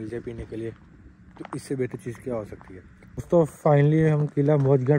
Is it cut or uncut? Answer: cut